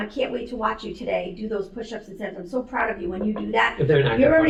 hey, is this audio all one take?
yes; 0 cuts

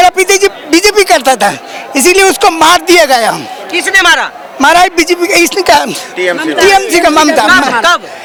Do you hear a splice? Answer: no; 0 cuts

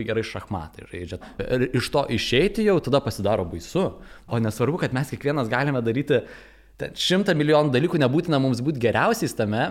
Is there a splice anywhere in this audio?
yes; 2 cuts; at 1.3 s, 4.2 s

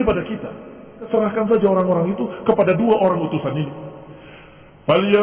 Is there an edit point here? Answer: yes; 1 cut; at 1.1 s

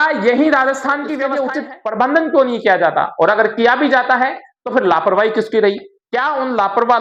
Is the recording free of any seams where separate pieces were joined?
no; 1 cut; at 1.3 s

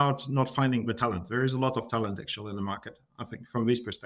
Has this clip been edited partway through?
no; 0 cuts

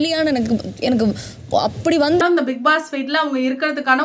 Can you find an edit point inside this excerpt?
yes; 1 cut; at 2.2 s

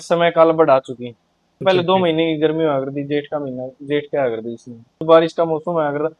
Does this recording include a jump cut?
yes; 2 cuts; at 1.6 s, 5.0 s

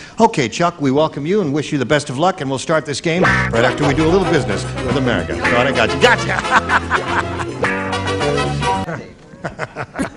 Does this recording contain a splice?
yes; 1 cut; at 3.2 s

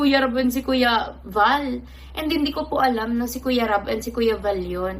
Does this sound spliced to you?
no; 0 cuts

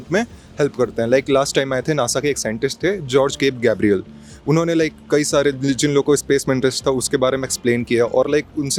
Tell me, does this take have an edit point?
no; 0 cuts

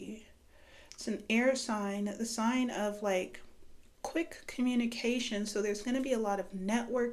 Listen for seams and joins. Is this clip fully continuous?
yes; 0 cuts

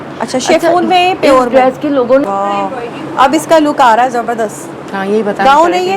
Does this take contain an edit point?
yes; 1 cut; at 2.2 s

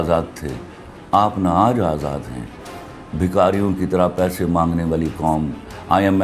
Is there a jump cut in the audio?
no; 0 cuts

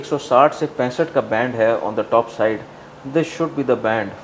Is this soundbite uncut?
yes; 0 cuts

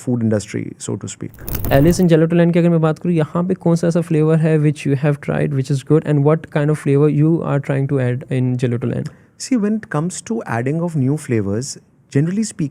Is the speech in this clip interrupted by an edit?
yes; 1 cut; at 1.6 s

